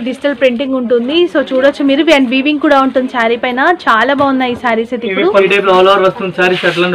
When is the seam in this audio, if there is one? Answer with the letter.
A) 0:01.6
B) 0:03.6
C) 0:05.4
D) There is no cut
C